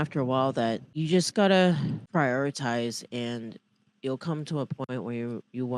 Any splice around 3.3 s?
no; 2 cuts; at 0.9 s, 2.0 s

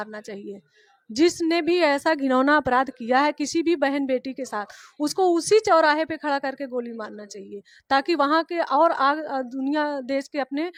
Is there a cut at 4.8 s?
no; 0 cuts

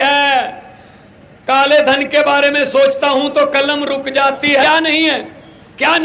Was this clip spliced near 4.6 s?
yes; 1 cut; at 4.6 s

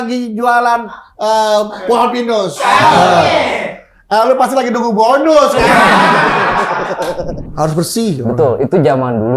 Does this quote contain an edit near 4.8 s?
no; 1 cut; at 7.4 s

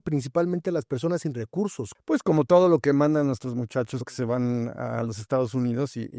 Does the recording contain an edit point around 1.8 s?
yes; 1 cut; at 1.8 s

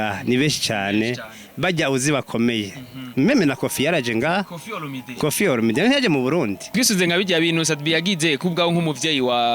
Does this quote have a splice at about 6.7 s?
yes; 1 cut; at 6.7 s

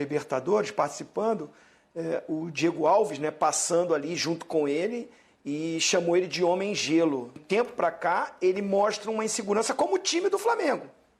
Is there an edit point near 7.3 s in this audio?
yes; 1 cut; at 7.3 s

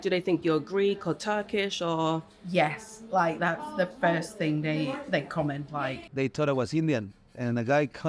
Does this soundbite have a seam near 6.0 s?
yes; 1 cut; at 6.0 s

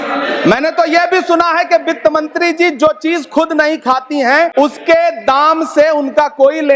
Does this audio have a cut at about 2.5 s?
no; 1 cut; at 4.5 s

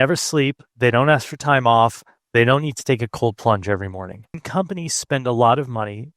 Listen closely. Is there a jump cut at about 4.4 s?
yes; 1 cut; at 4.4 s

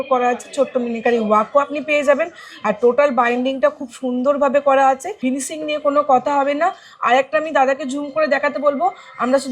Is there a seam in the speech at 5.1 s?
yes; 1 cut; at 5.1 s

